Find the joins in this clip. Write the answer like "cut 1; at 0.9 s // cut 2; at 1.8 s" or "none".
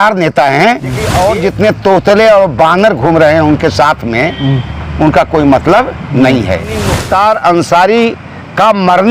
cut 1; at 1.1 s // cut 2; at 7.0 s